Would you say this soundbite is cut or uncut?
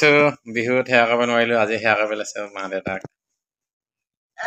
uncut